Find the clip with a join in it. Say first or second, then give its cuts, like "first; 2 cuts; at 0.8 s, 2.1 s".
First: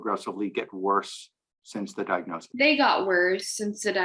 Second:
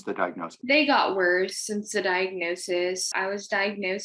second; 1 cut; at 3.1 s